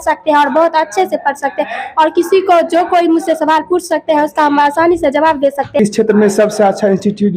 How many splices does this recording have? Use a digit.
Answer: 1